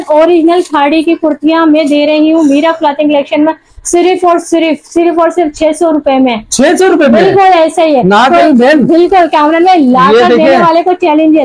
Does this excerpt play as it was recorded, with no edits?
yes; 0 cuts

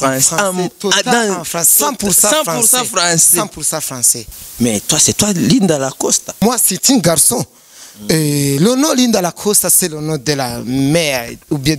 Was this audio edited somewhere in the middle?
yes; 2 cuts; at 4.1 s, 6.4 s

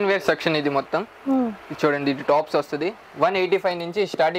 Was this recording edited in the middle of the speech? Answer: no; 0 cuts

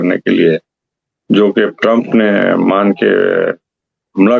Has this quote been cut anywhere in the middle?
no; 0 cuts

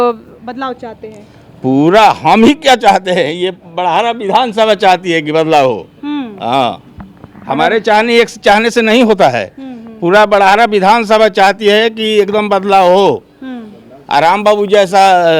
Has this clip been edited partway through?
no; 0 cuts

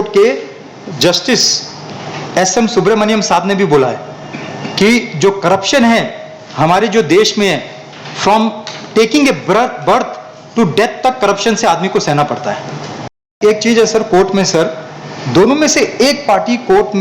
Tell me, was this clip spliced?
yes; 1 cut; at 13.3 s

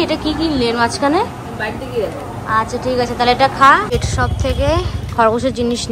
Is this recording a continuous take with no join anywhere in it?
no; 1 cut; at 3.9 s

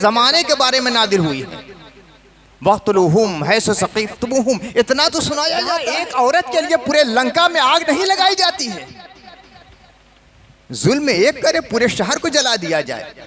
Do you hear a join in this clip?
yes; 1 cut; at 5.9 s

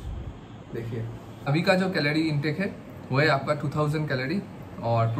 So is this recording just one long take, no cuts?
no; 1 cut; at 1.5 s

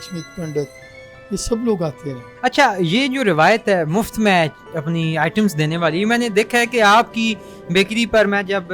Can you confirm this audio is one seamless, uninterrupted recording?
no; 1 cut; at 2.3 s

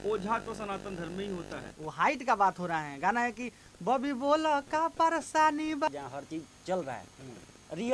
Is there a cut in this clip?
yes; 2 cuts; at 1.6 s, 5.9 s

